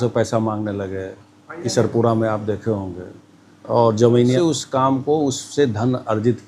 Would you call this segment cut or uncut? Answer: cut